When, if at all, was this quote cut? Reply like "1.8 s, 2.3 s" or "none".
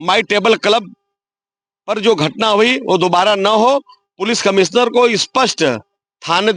none